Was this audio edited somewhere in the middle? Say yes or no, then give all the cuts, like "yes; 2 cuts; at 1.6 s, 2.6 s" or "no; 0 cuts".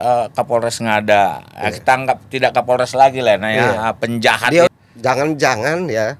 yes; 1 cut; at 4.7 s